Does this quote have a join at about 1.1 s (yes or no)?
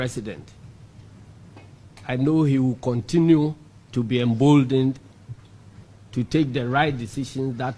no